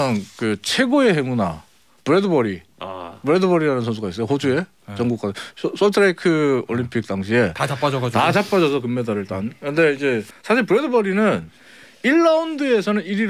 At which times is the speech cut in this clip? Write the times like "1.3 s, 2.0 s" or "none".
10.3 s